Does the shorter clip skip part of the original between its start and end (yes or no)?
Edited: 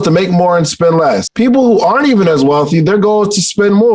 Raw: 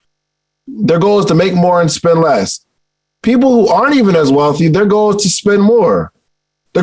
yes